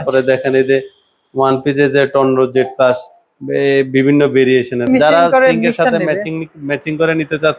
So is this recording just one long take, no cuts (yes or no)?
no